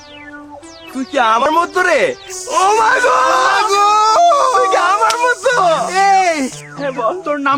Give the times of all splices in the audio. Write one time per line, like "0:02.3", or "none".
0:01.4